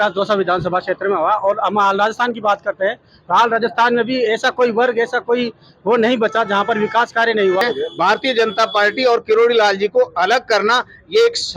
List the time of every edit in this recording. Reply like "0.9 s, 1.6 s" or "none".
7.6 s